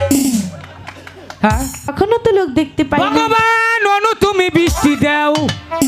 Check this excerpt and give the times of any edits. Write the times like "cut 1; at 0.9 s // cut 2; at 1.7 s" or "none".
cut 1; at 1.9 s